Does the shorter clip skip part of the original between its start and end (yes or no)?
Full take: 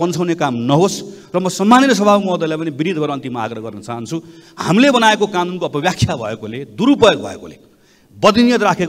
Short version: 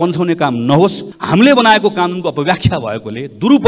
yes